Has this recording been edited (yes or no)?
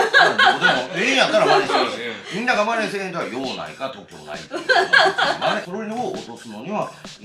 yes